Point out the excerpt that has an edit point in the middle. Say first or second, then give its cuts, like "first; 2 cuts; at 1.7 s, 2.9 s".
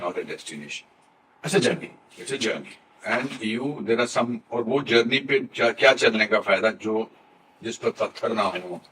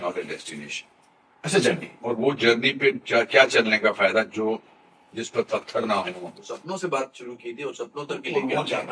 second; 2 cuts; at 1.9 s, 6.3 s